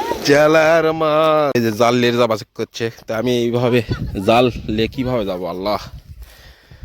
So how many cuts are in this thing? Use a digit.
1